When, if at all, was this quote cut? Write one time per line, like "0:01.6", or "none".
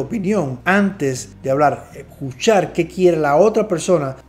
none